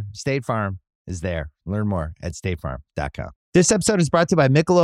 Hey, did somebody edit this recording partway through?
yes; 1 cut; at 3.4 s

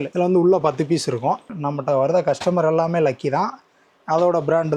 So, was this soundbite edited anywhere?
yes; 1 cut; at 1.5 s

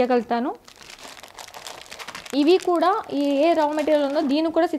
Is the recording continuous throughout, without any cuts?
yes; 0 cuts

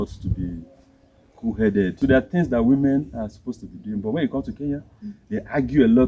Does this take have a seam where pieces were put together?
yes; 1 cut; at 1.9 s

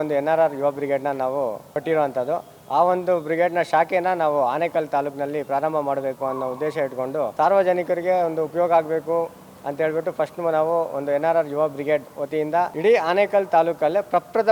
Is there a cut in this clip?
yes; 3 cuts; at 1.7 s, 7.3 s, 12.7 s

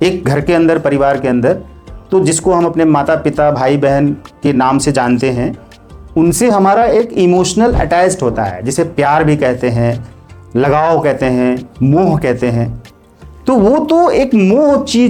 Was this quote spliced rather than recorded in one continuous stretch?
no; 0 cuts

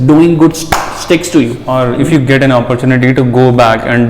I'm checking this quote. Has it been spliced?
yes; 1 cut; at 1.6 s

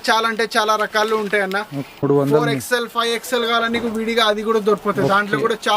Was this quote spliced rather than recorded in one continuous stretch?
yes; 1 cut; at 2.0 s

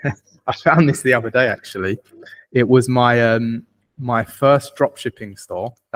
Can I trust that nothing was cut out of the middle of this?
yes; 0 cuts

